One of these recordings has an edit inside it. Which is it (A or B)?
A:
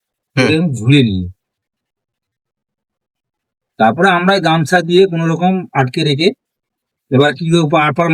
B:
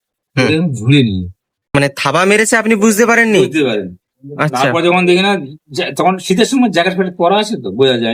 B